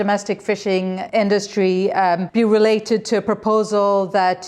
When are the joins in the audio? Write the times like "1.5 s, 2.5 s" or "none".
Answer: 1.0 s, 2.3 s